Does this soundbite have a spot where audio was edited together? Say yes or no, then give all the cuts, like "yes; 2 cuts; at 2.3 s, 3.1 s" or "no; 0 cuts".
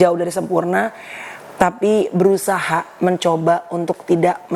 no; 0 cuts